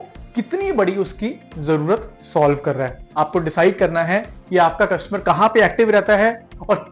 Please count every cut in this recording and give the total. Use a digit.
1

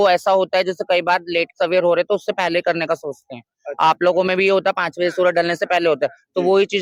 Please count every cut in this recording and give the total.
0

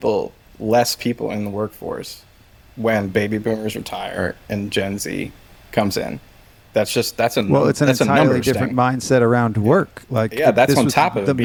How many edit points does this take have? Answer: 0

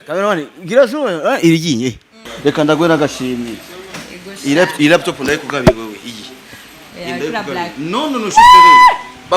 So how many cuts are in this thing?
1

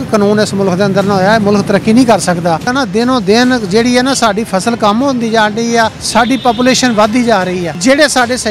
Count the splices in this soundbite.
3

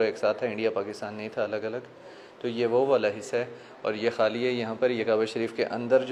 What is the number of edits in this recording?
0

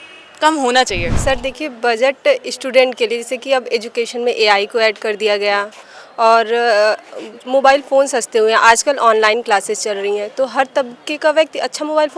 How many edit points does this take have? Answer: 1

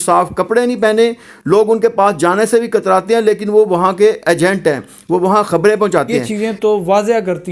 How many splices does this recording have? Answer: 1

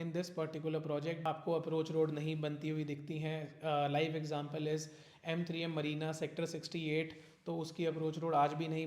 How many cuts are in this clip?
1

